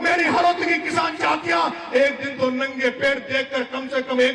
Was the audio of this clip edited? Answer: no; 0 cuts

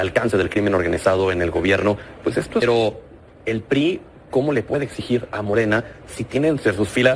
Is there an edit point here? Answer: yes; 1 cut; at 2.6 s

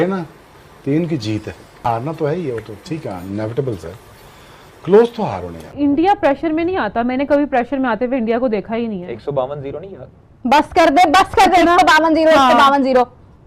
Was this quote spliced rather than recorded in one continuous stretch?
yes; 2 cuts; at 1.9 s, 5.6 s

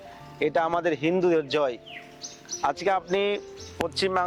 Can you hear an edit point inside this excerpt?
no; 0 cuts

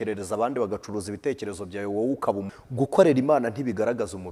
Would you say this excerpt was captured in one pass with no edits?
no; 1 cut; at 2.4 s

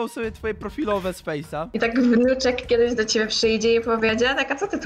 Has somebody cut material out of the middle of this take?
yes; 1 cut; at 1.7 s

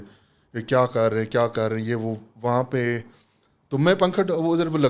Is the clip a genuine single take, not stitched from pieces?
yes; 0 cuts

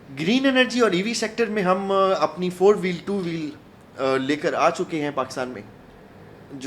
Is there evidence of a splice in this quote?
no; 0 cuts

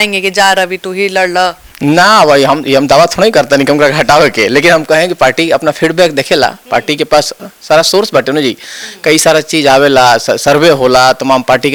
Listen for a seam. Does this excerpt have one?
no; 0 cuts

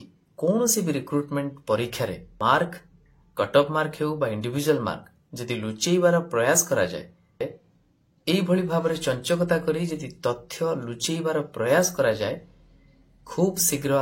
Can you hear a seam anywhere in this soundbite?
yes; 2 cuts; at 2.3 s, 7.4 s

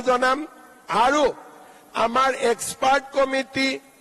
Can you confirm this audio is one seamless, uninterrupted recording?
yes; 0 cuts

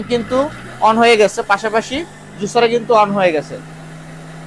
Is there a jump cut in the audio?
no; 0 cuts

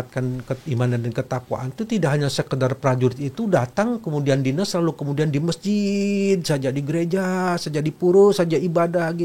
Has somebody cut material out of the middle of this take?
no; 0 cuts

